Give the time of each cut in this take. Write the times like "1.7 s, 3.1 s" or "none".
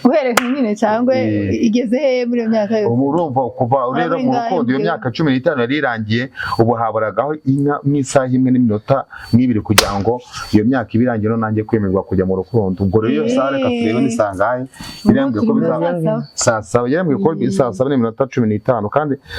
none